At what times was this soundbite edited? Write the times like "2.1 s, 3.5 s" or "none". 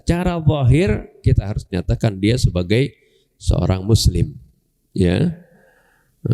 none